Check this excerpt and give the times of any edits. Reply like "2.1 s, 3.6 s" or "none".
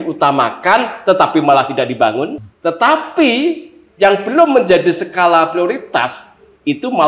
2.4 s